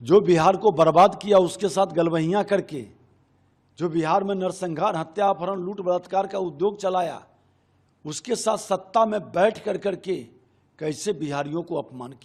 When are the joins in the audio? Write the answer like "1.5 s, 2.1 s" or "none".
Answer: none